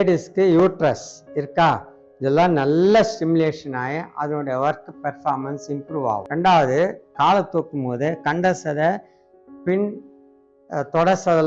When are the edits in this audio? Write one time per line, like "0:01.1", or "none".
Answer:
0:06.3